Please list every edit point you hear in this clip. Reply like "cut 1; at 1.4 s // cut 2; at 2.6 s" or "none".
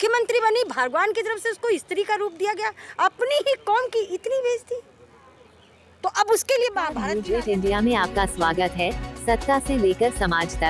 cut 1; at 7.0 s